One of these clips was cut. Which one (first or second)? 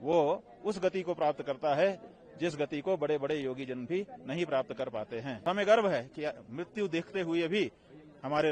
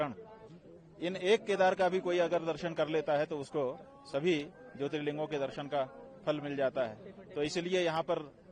first